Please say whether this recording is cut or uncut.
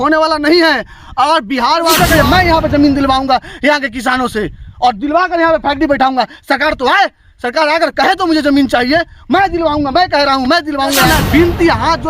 cut